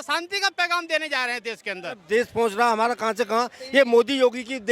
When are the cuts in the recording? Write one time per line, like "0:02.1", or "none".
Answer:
0:02.0